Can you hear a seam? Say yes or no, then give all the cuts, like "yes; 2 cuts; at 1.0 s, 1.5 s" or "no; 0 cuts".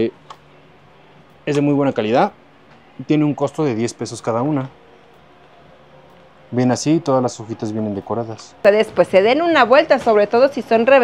yes; 1 cut; at 8.6 s